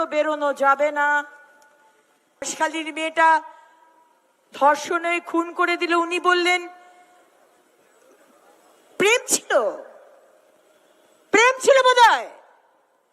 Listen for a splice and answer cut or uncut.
cut